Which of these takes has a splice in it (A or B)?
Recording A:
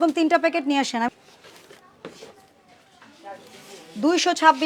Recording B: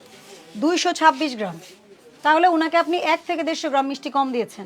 A